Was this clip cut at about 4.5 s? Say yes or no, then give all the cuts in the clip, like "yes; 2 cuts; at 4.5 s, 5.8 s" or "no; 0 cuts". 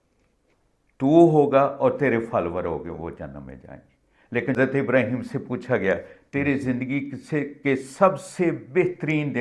yes; 1 cut; at 4.5 s